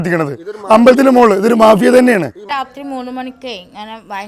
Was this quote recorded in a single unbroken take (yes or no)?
no